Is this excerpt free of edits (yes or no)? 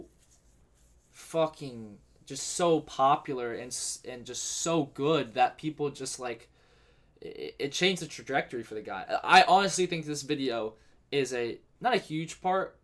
yes